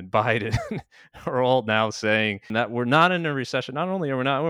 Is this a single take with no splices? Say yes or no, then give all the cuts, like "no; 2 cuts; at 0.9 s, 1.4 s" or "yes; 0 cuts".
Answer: no; 1 cut; at 2.5 s